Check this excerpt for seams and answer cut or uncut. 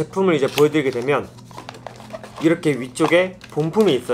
uncut